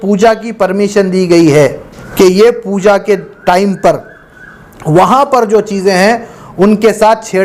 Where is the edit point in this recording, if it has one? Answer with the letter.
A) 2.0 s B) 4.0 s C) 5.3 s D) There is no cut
A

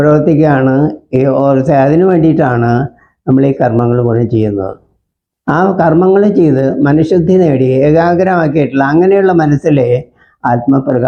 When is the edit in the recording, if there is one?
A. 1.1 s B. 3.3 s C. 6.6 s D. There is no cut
D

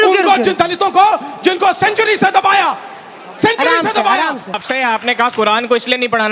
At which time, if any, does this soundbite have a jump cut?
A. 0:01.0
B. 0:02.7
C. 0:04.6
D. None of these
C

